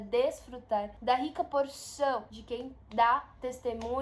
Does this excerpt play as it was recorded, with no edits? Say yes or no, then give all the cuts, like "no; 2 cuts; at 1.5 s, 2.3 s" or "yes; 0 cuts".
no; 2 cuts; at 0.9 s, 2.4 s